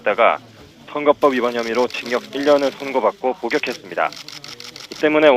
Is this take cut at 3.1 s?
no; 1 cut; at 1.3 s

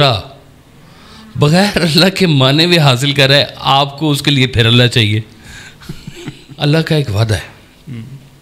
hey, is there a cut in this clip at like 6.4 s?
yes; 1 cut; at 6.4 s

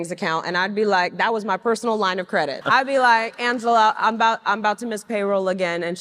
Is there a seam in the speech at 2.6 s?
yes; 1 cut; at 2.6 s

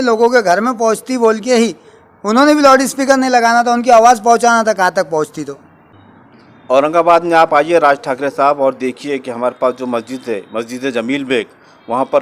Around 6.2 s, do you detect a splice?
yes; 1 cut; at 6.2 s

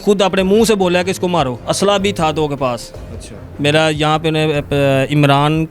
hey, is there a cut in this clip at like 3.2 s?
no; 1 cut; at 1.6 s

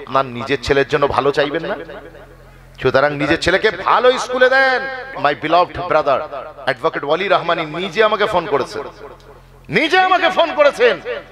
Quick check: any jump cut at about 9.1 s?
no; 1 cut; at 5.1 s

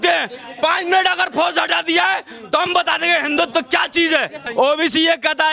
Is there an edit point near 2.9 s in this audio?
no; 1 cut; at 4.4 s

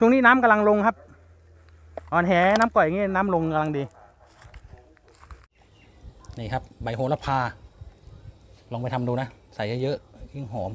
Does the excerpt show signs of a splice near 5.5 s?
yes; 1 cut; at 5.5 s

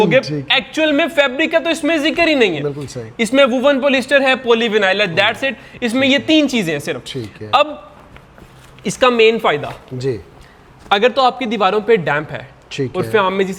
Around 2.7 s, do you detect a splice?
no; 0 cuts

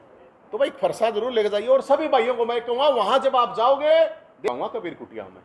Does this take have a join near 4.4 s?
yes; 1 cut; at 4.4 s

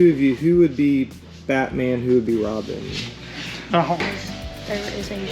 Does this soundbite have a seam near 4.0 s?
yes; 1 cut; at 4.0 s

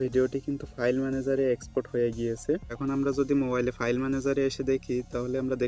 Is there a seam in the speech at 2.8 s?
yes; 1 cut; at 2.8 s

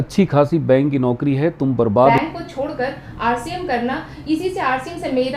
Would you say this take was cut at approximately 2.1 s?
yes; 1 cut; at 2.1 s

